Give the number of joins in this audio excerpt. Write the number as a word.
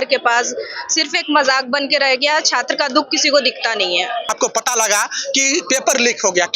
one